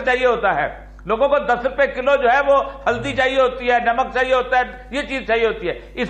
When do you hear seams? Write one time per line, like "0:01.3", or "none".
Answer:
none